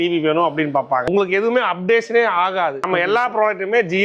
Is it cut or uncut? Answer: cut